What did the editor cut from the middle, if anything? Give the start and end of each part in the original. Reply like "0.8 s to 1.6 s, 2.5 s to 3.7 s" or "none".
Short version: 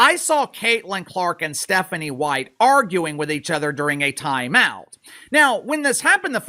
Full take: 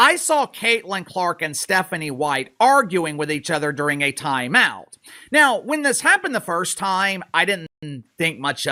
none

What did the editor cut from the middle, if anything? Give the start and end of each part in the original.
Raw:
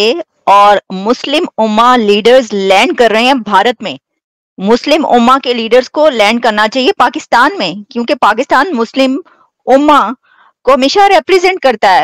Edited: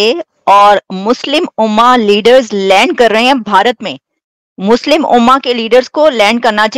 none

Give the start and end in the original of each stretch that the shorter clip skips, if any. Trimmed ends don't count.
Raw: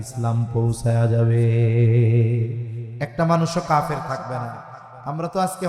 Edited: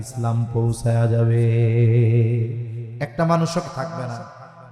3.7 s to 4.0 s

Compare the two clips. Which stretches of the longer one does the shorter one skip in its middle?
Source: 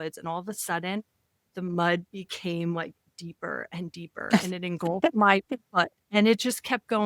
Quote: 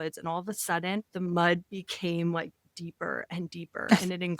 1.1 s to 1.5 s

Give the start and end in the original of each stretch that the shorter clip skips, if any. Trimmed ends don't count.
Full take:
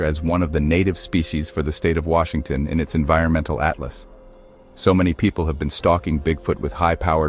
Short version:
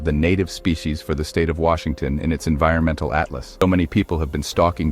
4.1 s to 4.9 s

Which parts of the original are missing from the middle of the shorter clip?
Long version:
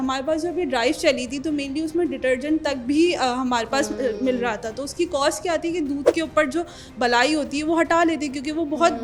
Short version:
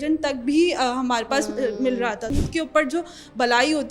4.9 s to 6.1 s

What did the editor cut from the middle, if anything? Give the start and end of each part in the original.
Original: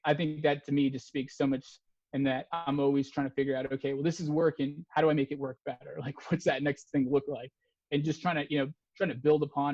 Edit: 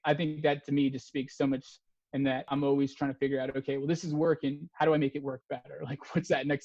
2.5 s to 2.6 s

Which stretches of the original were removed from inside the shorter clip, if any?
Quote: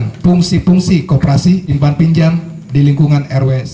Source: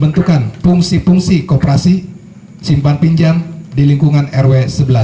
2.1 s to 2.7 s

